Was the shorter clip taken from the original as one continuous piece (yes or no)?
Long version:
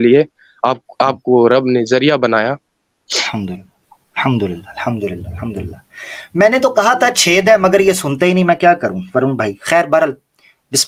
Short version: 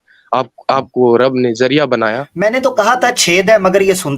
no